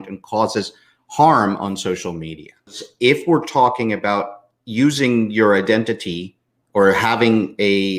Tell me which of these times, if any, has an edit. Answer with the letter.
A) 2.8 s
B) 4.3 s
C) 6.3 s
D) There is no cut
A